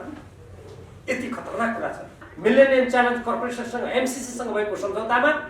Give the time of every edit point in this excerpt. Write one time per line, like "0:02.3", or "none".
0:02.2